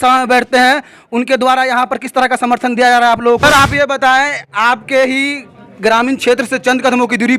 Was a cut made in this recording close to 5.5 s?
no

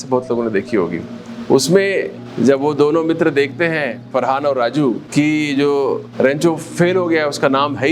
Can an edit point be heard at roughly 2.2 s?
yes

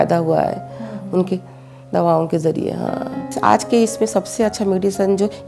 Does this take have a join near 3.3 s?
yes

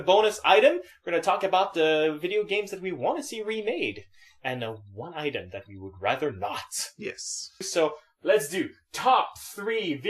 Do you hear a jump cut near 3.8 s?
yes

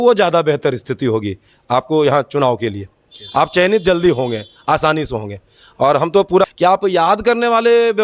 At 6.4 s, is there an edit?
yes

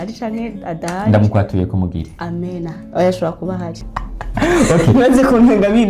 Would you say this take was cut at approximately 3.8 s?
yes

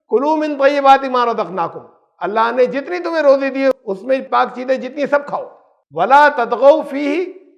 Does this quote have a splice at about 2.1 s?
no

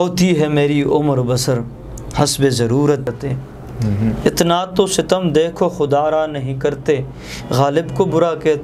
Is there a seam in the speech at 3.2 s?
yes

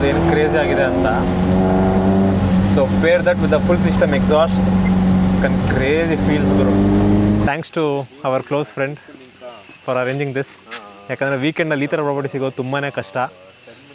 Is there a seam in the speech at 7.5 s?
yes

